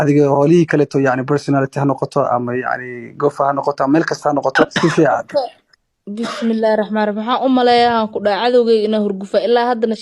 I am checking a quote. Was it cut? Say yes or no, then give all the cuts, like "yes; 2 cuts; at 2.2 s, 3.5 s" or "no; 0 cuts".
yes; 1 cut; at 4.7 s